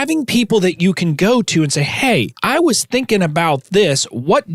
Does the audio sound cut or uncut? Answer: cut